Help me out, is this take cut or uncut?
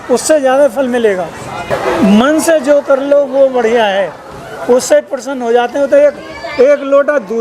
cut